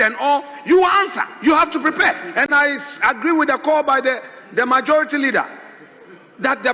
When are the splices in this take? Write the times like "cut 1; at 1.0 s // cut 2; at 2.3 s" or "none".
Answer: none